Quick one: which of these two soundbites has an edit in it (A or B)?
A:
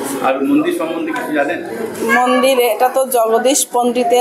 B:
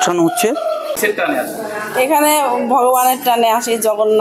B